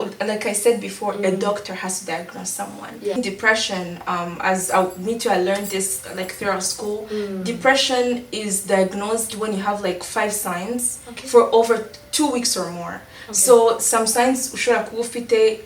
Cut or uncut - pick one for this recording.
cut